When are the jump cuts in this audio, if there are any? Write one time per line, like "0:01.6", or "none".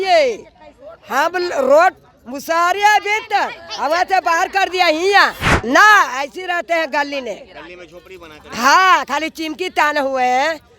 0:05.5